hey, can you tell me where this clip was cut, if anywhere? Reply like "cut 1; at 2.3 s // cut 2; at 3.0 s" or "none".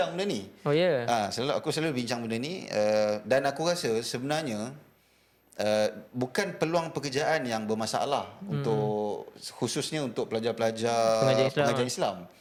none

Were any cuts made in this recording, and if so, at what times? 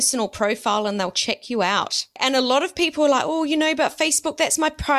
cut 1; at 2.2 s

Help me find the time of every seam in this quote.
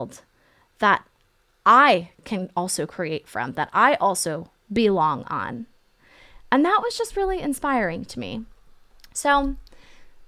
none

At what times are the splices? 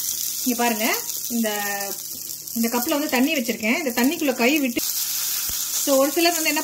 cut 1; at 4.8 s

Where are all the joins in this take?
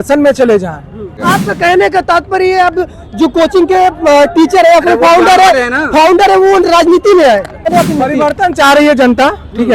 cut 1; at 1.1 s // cut 2; at 7.6 s

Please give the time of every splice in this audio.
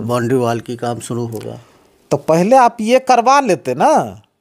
none

